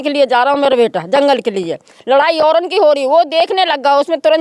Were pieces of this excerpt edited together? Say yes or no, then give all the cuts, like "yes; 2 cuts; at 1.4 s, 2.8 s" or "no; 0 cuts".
no; 0 cuts